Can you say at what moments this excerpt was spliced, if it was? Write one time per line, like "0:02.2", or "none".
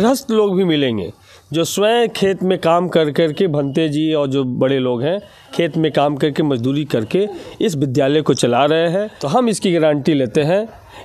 0:09.2